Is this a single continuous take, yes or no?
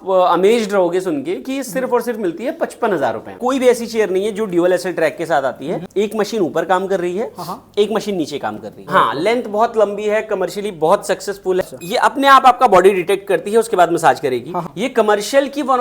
no